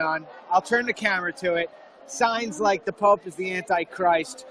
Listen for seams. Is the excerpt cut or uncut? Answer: cut